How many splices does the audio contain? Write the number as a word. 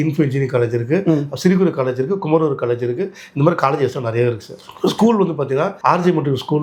zero